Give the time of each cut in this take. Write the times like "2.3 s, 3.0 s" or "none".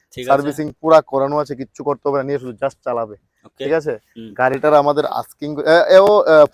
none

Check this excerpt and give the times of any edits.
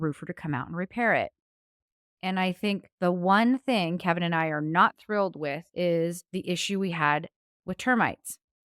2.3 s, 5.6 s, 6.3 s

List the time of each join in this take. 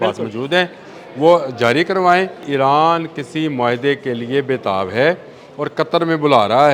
2.4 s

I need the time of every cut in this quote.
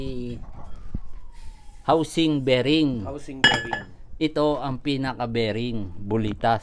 none

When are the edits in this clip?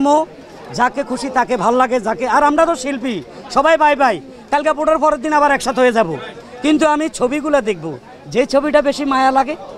none

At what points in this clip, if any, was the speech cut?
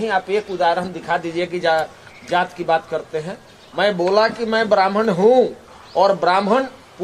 none

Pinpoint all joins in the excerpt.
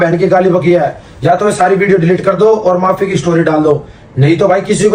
none

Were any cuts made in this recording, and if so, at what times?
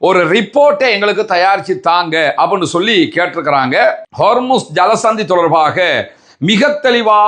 4.1 s

